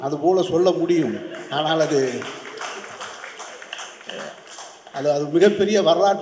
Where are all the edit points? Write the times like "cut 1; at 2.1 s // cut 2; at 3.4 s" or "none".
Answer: none